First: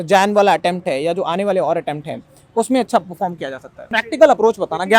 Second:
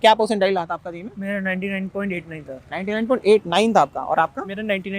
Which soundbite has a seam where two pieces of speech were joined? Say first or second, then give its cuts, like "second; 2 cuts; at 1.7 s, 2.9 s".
first; 1 cut; at 3.8 s